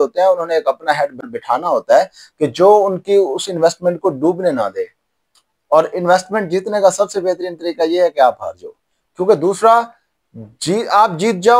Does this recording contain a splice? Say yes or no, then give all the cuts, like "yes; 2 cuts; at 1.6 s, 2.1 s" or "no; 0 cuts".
no; 0 cuts